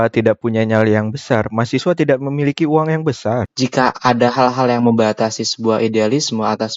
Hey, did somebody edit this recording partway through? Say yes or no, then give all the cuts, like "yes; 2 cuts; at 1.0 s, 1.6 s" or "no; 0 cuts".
yes; 1 cut; at 3.4 s